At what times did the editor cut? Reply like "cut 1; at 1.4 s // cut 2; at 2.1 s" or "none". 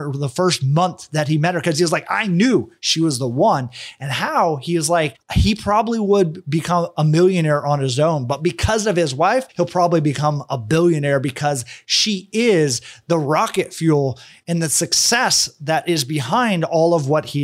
cut 1; at 9.5 s